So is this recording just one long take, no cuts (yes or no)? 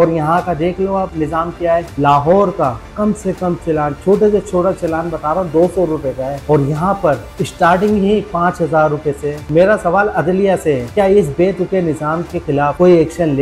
no